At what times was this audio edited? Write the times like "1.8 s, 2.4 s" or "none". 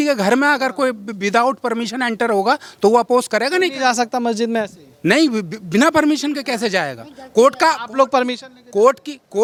none